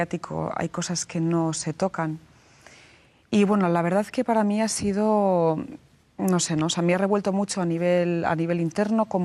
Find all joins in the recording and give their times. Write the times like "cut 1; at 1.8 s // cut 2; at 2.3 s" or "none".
cut 1; at 4.0 s